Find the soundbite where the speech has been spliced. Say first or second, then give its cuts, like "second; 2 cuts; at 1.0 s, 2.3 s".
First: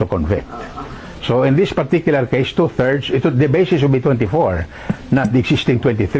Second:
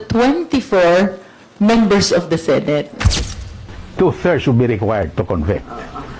second; 1 cut; at 3.2 s